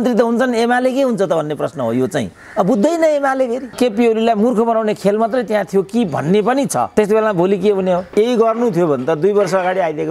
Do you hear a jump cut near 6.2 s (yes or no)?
no